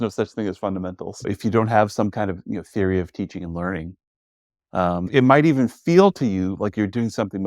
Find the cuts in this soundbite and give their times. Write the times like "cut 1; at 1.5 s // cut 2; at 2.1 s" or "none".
cut 1; at 1.2 s // cut 2; at 5.1 s